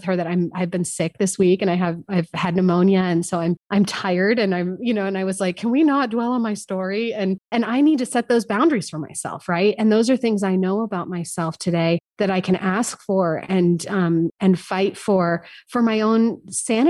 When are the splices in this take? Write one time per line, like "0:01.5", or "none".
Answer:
0:07.4
0:14.3